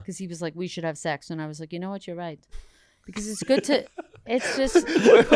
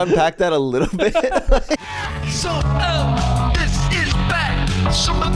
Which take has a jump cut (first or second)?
second